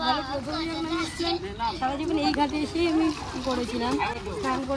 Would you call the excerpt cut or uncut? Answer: uncut